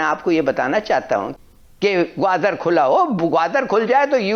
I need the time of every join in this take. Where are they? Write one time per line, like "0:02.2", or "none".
none